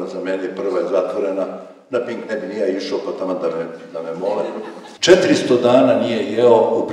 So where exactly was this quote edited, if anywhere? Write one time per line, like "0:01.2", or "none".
0:04.8